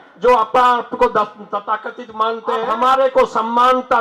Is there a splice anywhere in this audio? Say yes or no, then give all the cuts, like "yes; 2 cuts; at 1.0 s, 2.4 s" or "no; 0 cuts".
yes; 1 cut; at 2.6 s